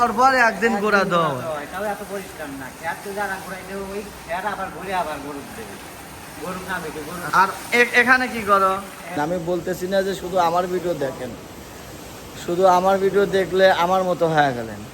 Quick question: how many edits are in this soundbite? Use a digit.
2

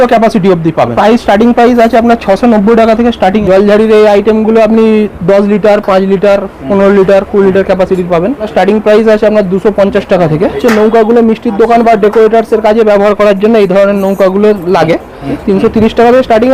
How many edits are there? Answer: 5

